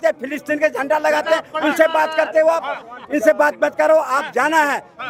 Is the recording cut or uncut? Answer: uncut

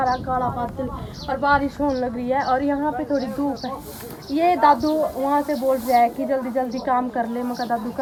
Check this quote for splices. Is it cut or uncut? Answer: uncut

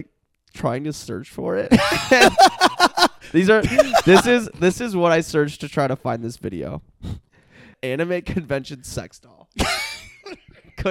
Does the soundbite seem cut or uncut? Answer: cut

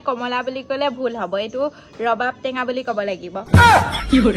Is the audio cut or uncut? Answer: cut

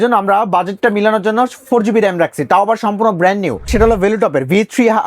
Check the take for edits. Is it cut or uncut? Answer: cut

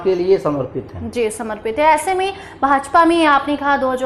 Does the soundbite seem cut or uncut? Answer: uncut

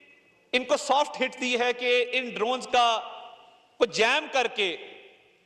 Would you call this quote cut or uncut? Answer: uncut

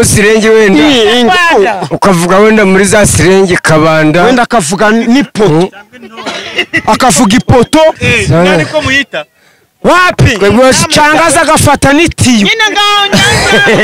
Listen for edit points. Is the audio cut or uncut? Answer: uncut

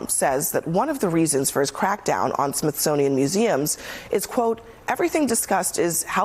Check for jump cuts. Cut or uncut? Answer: uncut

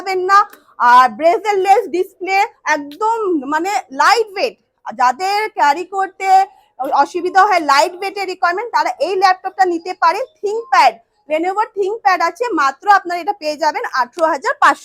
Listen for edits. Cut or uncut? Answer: uncut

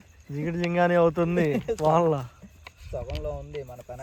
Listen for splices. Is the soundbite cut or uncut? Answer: uncut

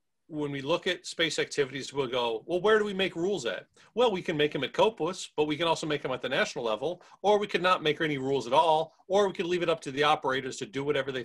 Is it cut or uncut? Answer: uncut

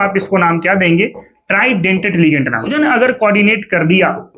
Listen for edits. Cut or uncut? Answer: cut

